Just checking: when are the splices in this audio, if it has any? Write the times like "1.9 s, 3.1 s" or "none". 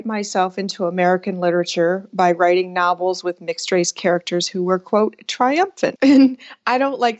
5.9 s